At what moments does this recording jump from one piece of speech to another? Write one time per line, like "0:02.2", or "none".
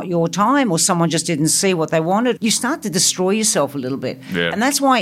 0:02.4